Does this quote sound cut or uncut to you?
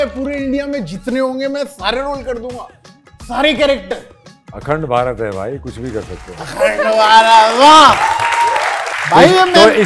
cut